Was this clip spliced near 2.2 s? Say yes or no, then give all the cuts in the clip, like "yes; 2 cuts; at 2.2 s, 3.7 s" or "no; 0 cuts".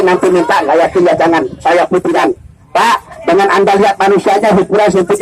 yes; 1 cut; at 2.2 s